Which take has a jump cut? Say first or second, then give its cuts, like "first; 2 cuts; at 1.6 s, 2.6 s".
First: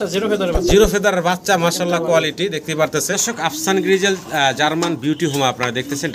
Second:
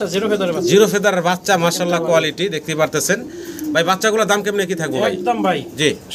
first; 1 cut; at 3.1 s